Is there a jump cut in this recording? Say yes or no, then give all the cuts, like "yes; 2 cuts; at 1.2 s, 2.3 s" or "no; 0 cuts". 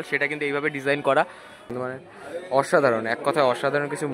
yes; 1 cut; at 1.6 s